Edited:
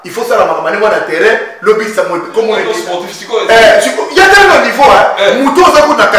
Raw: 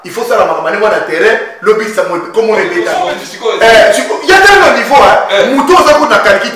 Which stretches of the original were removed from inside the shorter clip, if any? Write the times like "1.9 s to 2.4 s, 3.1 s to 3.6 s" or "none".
2.9 s to 3.0 s